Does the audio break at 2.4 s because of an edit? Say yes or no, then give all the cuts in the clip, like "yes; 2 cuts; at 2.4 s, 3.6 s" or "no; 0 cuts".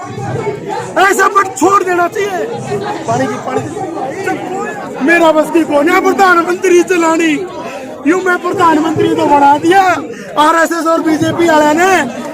yes; 2 cuts; at 2.4 s, 4.3 s